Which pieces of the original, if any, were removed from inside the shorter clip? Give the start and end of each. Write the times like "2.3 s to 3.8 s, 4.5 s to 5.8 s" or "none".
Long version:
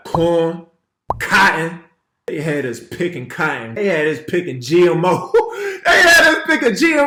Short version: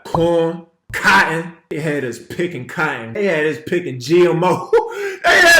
1.0 s to 1.2 s, 1.9 s to 2.2 s